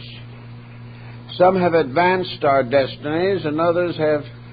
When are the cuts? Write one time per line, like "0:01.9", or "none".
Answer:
0:01.6